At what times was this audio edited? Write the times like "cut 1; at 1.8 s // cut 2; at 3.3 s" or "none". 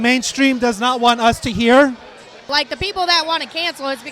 cut 1; at 2.5 s